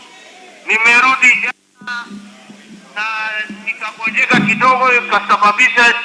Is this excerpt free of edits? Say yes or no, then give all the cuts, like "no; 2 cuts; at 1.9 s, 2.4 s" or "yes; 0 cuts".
yes; 0 cuts